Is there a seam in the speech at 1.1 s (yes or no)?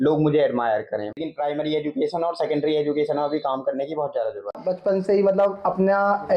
yes